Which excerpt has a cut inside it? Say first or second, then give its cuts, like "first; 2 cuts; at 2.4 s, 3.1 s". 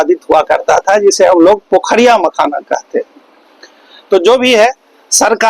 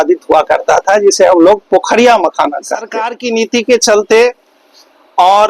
second; 1 cut; at 3.1 s